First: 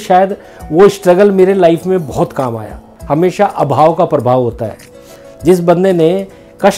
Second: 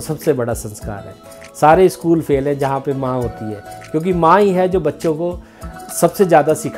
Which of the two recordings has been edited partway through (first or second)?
first